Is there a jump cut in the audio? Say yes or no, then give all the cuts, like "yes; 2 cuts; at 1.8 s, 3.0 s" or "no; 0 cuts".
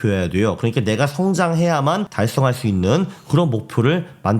yes; 1 cut; at 2.1 s